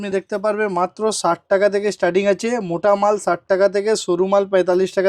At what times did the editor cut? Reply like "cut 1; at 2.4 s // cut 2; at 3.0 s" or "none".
none